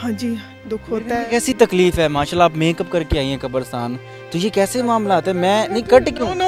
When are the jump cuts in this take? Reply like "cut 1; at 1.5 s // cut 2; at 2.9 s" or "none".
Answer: none